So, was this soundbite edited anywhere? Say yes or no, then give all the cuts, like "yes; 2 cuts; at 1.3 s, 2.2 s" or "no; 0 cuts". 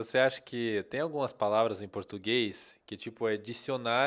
no; 0 cuts